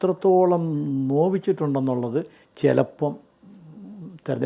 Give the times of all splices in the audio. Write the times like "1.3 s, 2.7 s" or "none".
none